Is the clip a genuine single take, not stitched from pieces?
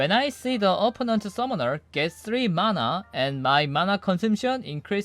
yes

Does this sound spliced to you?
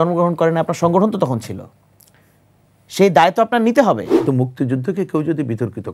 yes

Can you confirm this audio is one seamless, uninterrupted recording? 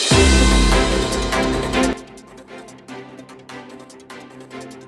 yes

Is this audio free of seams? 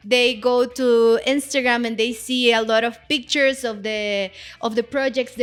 yes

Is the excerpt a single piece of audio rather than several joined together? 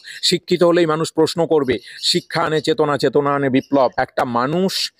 no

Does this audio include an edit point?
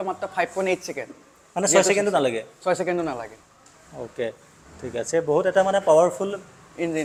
no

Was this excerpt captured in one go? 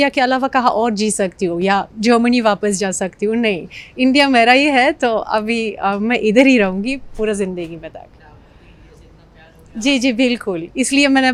yes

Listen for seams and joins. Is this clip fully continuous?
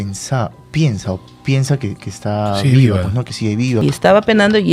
no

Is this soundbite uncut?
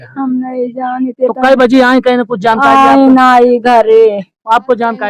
yes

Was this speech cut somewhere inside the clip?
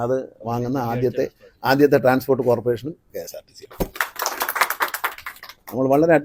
no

